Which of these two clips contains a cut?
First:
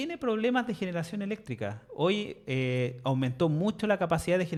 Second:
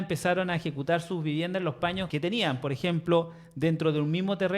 second; 1 cut; at 2.1 s

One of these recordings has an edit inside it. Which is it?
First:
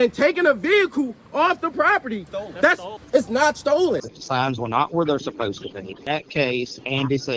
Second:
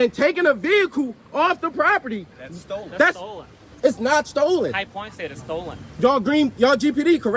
first; 3 cuts; at 2.6 s, 4.1 s, 6.0 s

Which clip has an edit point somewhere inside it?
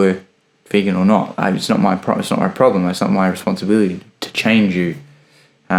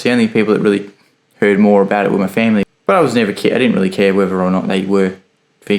second; 1 cut; at 2.7 s

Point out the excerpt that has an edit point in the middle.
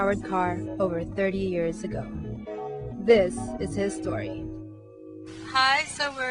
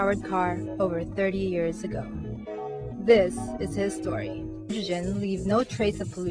first; 1 cut; at 4.7 s

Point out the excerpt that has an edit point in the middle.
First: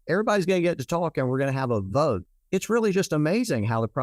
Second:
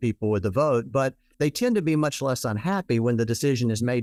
first; 1 cut; at 2.2 s

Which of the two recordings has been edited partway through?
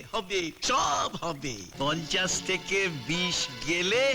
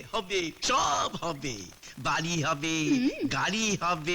first; 1 cut; at 1.6 s

